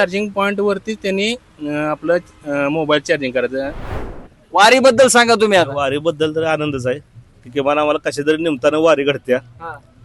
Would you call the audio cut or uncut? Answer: cut